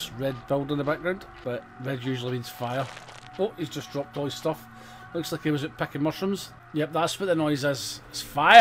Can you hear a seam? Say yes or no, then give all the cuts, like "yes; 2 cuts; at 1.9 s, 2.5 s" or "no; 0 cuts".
yes; 2 cuts; at 1.3 s, 6.6 s